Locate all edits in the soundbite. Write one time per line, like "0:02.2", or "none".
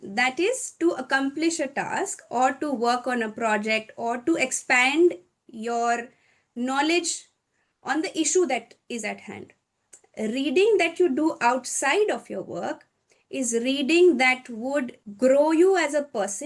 none